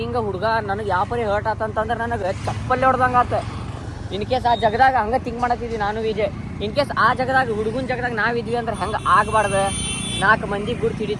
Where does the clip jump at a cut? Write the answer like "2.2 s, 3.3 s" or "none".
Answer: none